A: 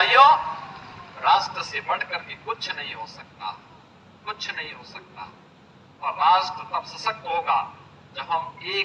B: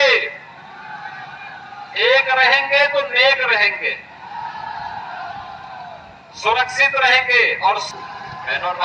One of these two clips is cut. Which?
B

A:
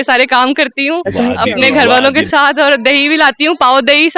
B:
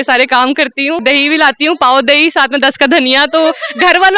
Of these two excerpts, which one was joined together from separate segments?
B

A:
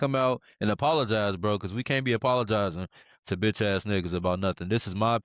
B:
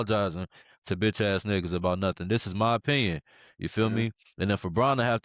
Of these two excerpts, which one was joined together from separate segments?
B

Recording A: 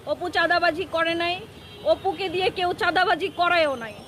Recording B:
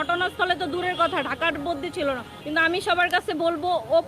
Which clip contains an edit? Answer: B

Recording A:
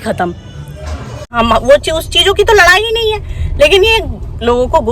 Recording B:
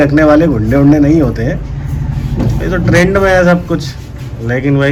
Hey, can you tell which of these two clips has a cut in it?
A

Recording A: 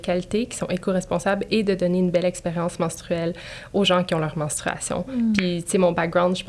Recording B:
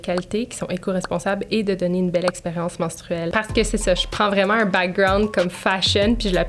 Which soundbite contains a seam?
B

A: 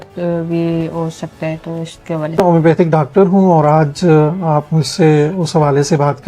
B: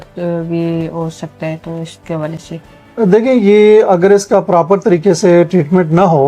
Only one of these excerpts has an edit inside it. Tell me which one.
A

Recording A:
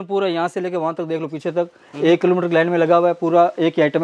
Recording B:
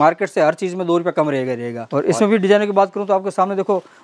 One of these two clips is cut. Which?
B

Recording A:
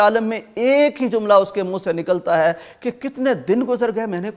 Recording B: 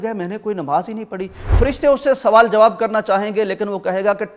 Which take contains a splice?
B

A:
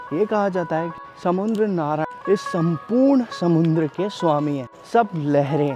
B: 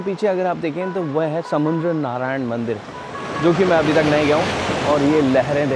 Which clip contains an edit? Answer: A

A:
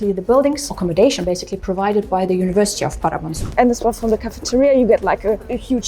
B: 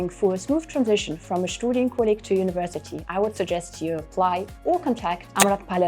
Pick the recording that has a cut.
A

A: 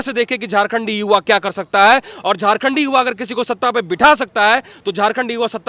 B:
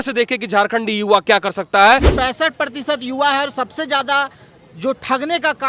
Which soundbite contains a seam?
B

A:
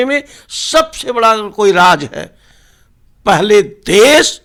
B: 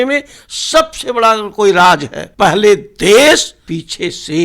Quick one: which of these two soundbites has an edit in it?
B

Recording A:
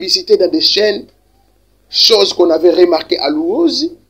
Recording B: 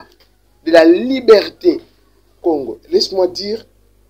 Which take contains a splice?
B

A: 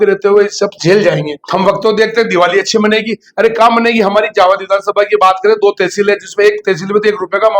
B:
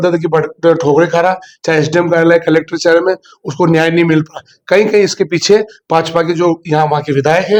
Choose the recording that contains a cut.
A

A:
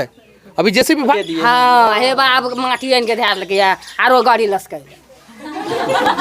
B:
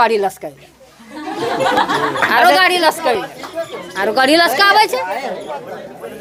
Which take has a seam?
A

